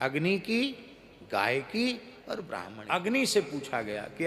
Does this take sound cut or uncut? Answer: cut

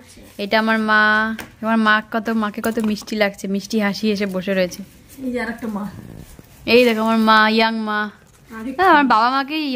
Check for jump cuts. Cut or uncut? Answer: uncut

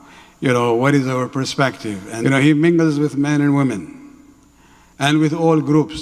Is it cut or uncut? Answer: cut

